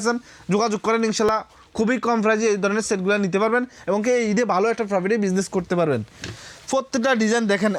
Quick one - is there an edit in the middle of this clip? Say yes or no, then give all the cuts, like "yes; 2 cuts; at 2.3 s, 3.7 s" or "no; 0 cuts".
no; 0 cuts